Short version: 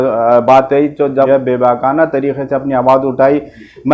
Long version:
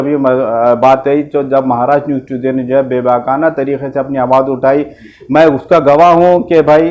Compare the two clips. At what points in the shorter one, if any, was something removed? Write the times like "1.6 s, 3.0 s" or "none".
1.3 s